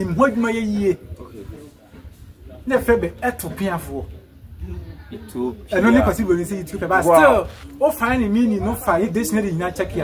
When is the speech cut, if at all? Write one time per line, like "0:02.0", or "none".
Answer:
none